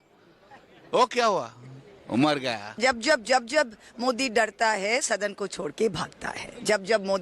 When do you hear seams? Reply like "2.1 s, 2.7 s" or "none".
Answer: 2.7 s